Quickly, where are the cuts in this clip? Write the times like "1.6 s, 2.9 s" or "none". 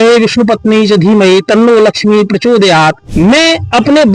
3.0 s